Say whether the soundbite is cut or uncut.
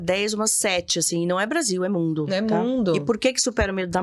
uncut